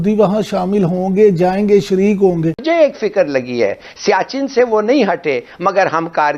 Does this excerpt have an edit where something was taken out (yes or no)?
yes